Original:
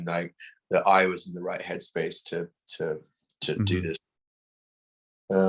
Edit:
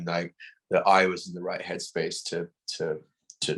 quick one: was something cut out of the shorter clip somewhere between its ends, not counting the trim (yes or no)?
no